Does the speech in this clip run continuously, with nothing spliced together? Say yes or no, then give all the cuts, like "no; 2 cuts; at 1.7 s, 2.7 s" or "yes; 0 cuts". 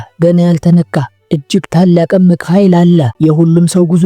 no; 1 cut; at 3.1 s